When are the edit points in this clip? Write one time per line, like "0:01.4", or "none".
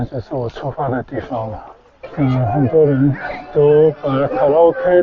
0:02.0